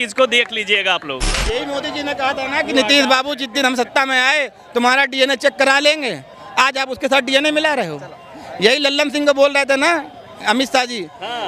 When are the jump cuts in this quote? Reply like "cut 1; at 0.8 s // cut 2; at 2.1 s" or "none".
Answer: cut 1; at 1.3 s